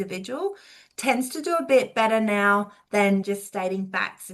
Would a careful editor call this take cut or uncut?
uncut